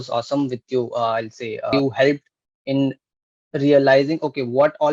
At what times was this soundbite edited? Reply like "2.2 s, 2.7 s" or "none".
1.7 s